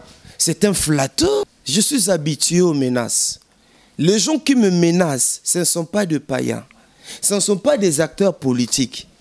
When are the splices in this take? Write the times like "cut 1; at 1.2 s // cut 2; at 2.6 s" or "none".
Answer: cut 1; at 1.6 s